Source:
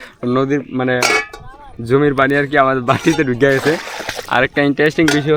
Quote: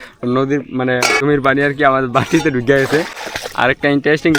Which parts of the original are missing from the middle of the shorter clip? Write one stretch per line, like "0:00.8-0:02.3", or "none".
0:01.2-0:02.0